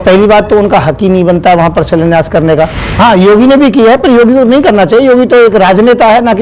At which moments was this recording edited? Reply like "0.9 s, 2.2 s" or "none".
2.8 s